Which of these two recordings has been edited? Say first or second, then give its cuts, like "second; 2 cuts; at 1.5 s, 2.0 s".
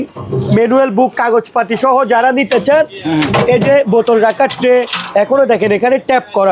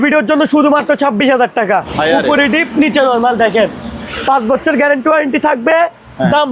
second; 1 cut; at 1.9 s